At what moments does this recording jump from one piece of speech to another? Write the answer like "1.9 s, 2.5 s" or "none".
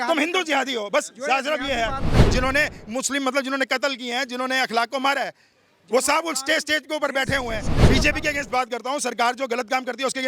2.2 s, 7.8 s